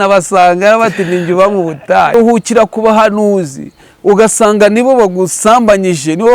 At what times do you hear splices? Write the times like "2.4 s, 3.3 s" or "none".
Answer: 2.1 s